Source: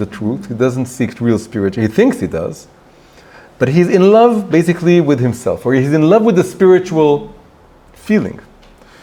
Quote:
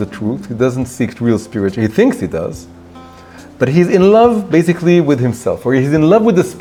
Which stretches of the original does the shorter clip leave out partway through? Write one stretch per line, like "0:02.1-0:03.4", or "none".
none